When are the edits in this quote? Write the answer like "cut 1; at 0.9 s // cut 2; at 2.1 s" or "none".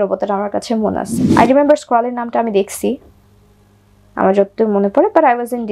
cut 1; at 1.2 s